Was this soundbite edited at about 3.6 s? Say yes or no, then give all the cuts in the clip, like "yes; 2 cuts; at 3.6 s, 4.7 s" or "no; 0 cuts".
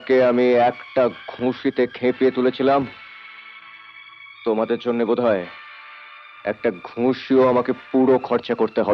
no; 0 cuts